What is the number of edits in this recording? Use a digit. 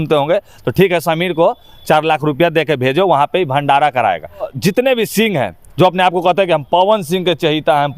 1